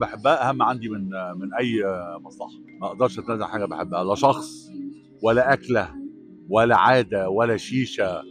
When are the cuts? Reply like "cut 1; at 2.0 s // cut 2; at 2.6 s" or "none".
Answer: cut 1; at 2.7 s